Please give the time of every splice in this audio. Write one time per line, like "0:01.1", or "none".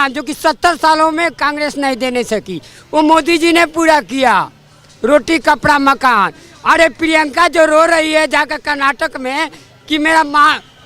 none